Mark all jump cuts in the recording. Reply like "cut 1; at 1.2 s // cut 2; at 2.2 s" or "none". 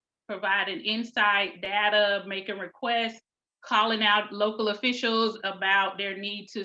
none